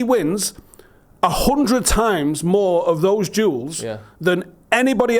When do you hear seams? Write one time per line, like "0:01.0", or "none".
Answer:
none